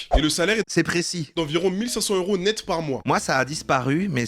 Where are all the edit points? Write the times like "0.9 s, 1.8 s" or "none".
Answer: 3.0 s